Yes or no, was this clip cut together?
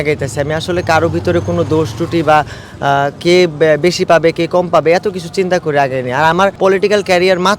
yes